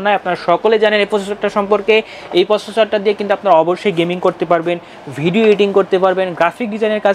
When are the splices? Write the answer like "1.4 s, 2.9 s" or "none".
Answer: none